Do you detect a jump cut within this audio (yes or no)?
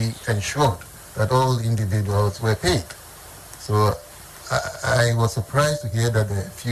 no